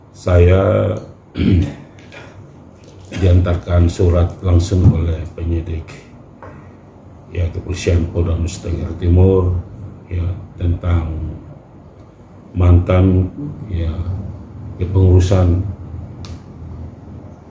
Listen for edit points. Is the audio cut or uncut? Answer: uncut